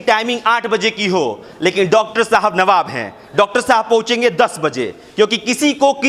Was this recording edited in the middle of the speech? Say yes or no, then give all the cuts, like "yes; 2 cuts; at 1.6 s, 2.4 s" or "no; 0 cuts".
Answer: no; 0 cuts